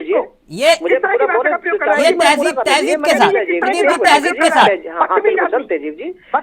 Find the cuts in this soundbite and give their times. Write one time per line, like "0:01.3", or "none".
none

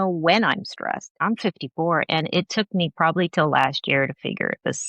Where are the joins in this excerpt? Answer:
0:01.1

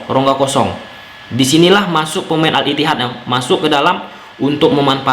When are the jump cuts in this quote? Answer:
0:02.5

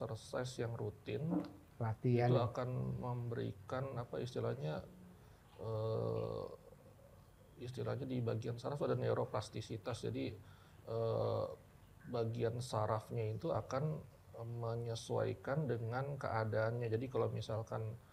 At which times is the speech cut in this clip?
none

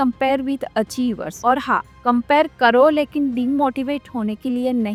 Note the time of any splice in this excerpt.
none

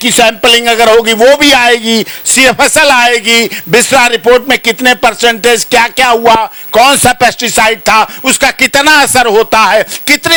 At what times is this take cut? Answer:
none

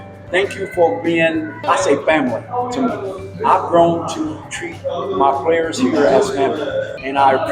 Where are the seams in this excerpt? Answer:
0:03.3

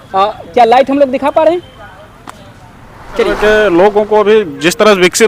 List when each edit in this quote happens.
0:03.2

